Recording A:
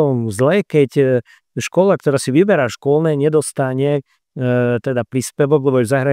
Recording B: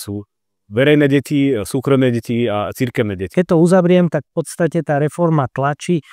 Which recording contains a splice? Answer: B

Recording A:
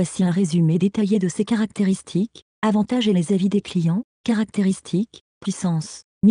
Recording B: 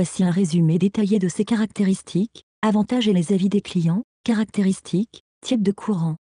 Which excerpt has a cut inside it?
B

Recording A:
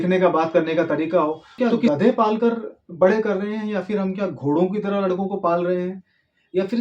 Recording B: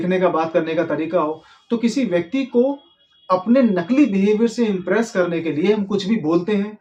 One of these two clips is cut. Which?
A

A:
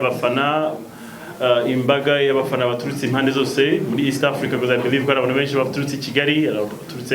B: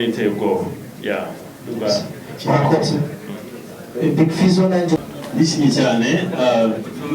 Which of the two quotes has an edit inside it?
B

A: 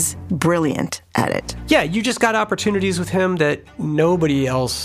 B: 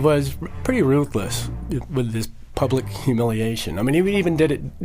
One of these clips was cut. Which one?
A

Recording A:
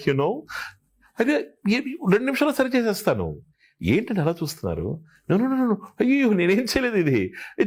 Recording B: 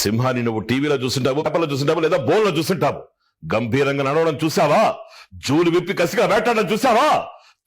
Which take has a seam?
B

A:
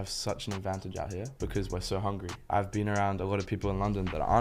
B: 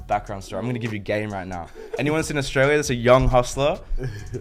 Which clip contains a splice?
A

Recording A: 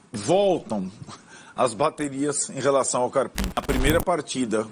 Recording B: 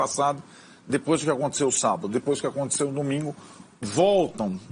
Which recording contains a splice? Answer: A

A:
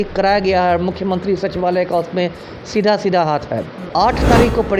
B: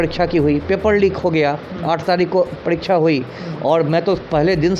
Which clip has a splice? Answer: A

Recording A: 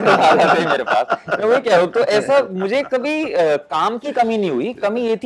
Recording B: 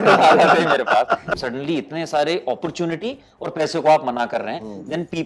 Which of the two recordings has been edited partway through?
B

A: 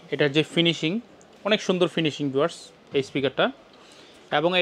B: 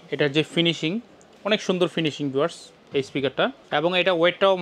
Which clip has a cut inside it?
B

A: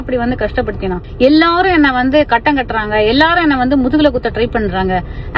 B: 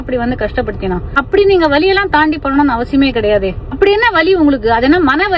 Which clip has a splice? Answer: A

